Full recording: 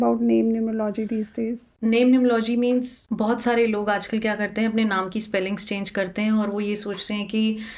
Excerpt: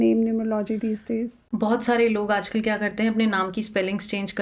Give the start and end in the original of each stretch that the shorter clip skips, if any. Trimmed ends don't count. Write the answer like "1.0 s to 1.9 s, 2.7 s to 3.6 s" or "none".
1.7 s to 3.0 s